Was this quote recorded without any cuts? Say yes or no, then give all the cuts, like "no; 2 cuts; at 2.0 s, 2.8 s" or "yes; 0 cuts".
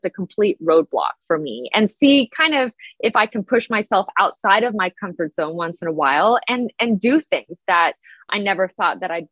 no; 1 cut; at 8.2 s